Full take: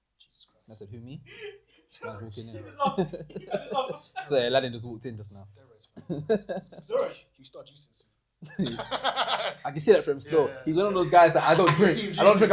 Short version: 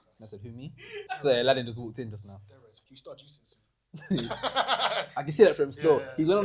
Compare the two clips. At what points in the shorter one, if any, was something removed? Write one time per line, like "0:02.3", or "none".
0:01.0
0:02.8